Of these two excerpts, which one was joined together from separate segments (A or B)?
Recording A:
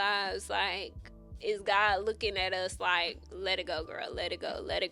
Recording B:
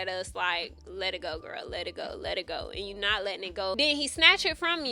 B